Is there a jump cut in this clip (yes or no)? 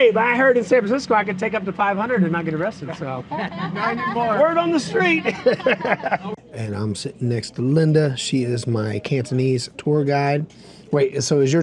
yes